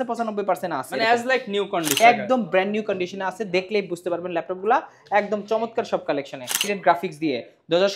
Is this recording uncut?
no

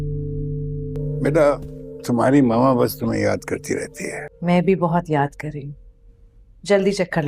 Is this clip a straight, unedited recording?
no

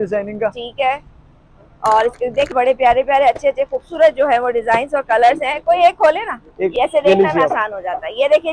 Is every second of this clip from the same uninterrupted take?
no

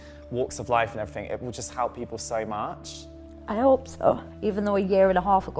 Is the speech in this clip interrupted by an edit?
yes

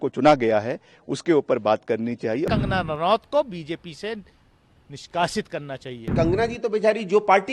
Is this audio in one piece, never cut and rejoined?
no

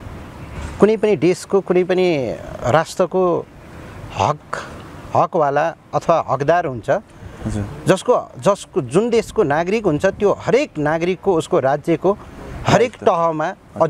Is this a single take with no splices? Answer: yes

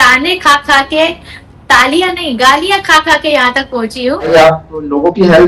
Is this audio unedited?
no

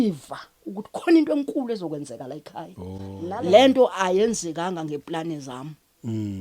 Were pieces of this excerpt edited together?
yes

